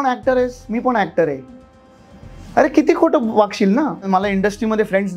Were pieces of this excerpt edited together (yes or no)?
yes